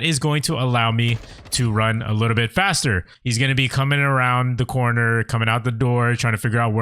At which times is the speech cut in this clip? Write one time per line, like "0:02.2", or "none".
0:03.1